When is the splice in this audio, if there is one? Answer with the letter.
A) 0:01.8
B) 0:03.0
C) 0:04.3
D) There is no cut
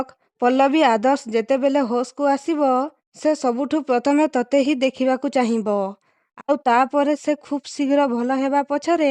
B